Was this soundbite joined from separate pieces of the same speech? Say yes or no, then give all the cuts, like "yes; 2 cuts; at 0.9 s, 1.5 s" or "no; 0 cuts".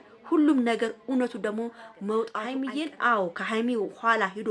yes; 1 cut; at 2.6 s